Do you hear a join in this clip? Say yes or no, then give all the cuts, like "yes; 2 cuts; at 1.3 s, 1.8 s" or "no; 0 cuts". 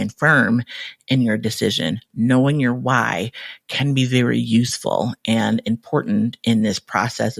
no; 0 cuts